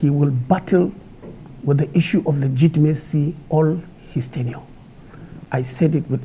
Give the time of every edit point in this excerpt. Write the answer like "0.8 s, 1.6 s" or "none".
5.3 s